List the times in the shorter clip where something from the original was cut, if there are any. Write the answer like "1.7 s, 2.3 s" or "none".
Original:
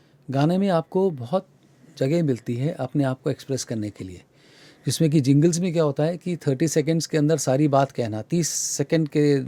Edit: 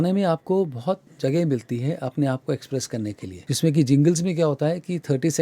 1.1 s, 3.3 s